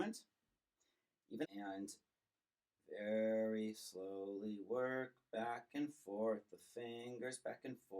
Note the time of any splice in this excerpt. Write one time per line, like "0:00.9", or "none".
0:01.5